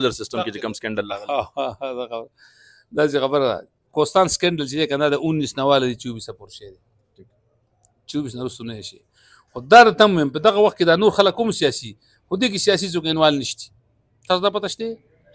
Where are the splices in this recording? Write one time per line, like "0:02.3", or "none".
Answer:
none